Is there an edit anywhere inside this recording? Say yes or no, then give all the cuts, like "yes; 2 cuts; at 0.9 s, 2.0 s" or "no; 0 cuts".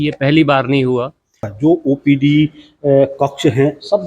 yes; 1 cut; at 1.5 s